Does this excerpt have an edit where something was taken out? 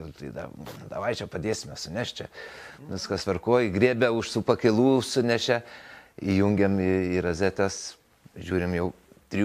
no; 0 cuts

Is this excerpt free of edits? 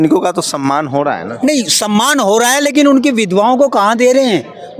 yes; 0 cuts

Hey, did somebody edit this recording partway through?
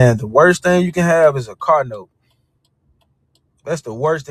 no; 0 cuts

